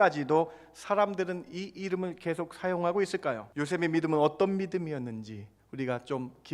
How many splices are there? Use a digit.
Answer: 1